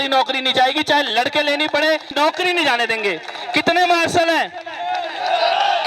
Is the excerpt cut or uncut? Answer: uncut